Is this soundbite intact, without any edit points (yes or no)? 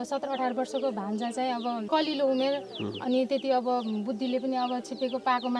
no